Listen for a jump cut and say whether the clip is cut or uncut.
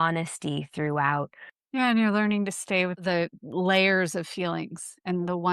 cut